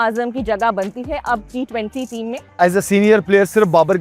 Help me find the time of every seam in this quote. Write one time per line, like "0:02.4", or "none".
0:02.6